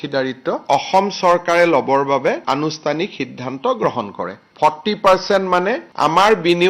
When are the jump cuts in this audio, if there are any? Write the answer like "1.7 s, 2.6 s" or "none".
none